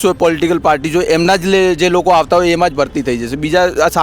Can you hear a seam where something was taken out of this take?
no; 0 cuts

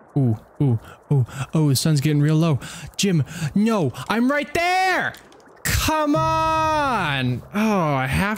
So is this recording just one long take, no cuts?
yes; 0 cuts

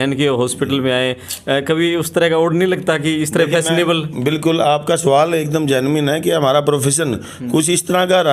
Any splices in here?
no; 0 cuts

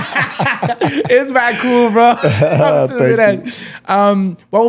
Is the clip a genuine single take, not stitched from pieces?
yes; 0 cuts

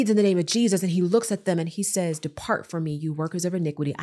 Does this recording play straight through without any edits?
yes; 0 cuts

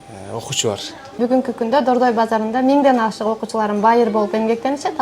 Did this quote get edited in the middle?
yes; 1 cut; at 1.2 s

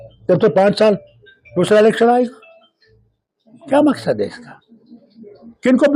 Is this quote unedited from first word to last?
yes; 0 cuts

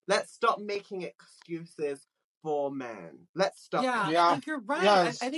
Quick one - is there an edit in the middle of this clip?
no; 0 cuts

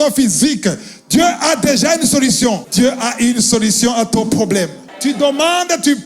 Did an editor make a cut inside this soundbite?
yes; 2 cuts; at 2.6 s, 4.8 s

